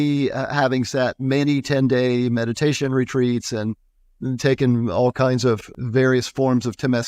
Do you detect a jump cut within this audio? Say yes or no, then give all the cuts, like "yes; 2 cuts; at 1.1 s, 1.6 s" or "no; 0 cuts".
yes; 1 cut; at 5.7 s